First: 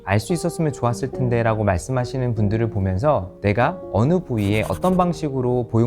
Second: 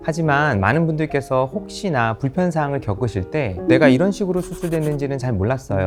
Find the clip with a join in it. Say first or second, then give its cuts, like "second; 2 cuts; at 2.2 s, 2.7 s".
first; 1 cut; at 3.3 s